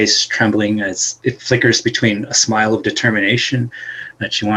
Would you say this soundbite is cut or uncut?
cut